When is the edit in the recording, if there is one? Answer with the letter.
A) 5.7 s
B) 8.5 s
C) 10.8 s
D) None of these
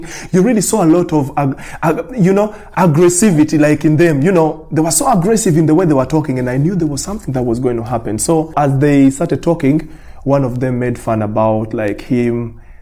B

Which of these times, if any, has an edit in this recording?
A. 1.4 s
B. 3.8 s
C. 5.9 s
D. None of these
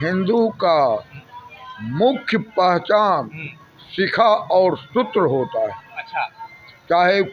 D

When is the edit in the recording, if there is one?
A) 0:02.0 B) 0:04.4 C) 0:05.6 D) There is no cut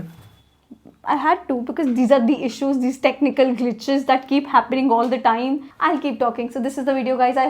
D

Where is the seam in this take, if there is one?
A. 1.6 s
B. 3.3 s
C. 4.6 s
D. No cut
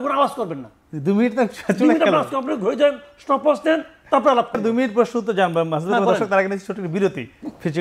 C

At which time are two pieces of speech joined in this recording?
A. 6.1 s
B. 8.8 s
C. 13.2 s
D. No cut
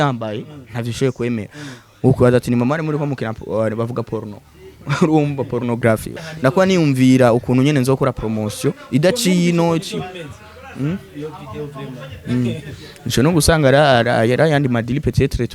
A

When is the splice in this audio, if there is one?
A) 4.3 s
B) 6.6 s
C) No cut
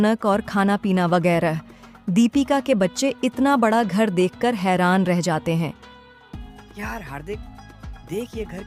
C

